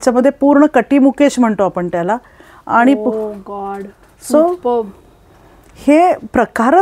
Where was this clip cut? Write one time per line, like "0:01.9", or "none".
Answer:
none